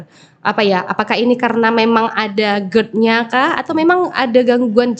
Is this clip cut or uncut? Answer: uncut